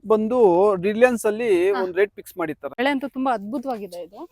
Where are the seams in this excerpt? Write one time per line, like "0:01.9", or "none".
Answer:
0:02.8